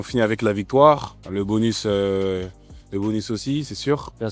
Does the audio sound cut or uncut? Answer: uncut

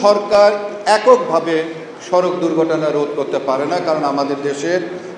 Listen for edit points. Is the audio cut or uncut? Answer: uncut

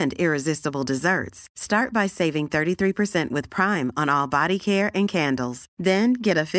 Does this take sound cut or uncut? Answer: uncut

